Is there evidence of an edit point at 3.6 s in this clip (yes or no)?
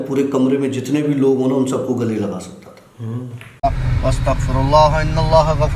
yes